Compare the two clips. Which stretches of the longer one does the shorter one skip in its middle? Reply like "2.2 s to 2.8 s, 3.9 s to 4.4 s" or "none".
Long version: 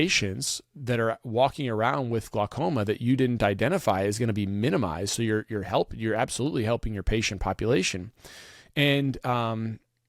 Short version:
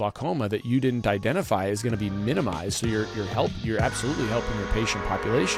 none